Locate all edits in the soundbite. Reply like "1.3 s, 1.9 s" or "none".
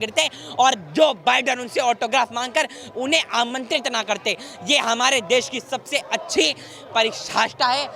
none